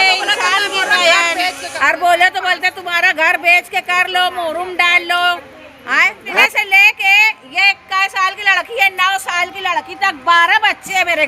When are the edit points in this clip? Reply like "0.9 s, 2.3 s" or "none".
1.7 s, 6.4 s